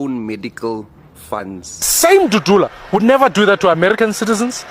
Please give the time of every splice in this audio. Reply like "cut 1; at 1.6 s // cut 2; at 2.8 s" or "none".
cut 1; at 1.9 s